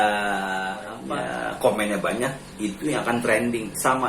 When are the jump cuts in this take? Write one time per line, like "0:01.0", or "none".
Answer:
0:00.9